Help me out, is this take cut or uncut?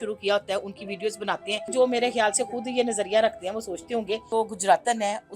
cut